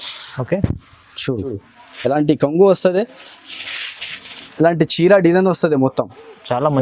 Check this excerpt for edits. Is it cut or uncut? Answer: cut